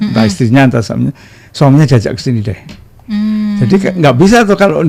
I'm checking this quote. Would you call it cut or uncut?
uncut